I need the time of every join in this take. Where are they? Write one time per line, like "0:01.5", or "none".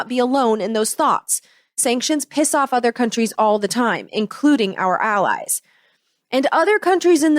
0:01.8